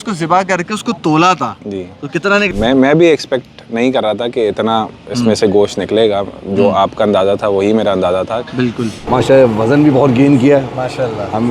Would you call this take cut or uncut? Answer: cut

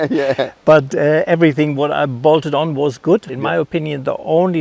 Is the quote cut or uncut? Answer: cut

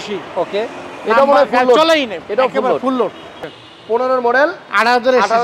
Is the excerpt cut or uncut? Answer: cut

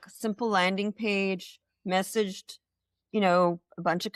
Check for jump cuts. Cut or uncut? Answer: uncut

